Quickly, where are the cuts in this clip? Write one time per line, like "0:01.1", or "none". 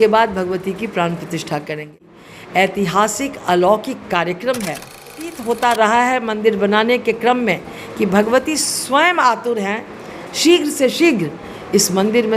0:02.1
0:05.3